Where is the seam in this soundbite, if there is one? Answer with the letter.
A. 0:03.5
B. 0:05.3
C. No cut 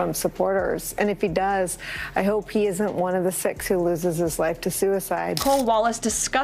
B